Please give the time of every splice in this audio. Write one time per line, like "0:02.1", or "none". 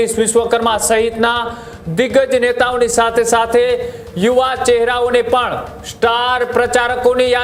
none